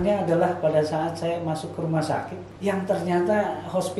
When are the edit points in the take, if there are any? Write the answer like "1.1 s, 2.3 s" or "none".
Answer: 2.4 s